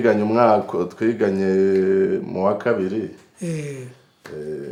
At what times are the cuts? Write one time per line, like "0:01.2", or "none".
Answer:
none

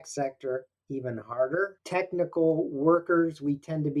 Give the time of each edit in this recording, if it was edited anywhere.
0:01.8

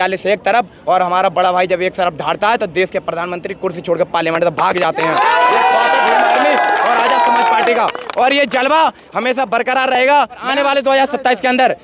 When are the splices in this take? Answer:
0:10.4

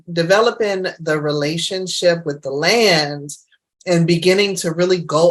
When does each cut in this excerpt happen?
none

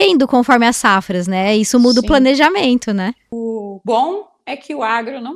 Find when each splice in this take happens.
0:03.3

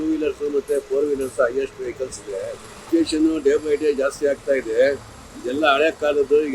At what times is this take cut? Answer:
0:02.7

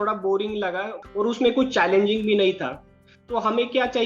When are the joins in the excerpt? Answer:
0:01.0

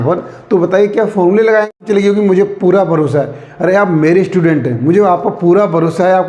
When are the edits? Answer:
0:01.8

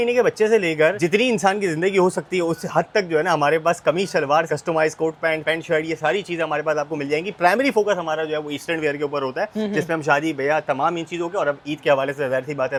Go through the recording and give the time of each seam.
none

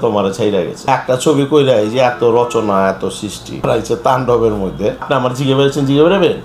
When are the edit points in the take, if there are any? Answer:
0:00.9
0:03.6
0:05.1

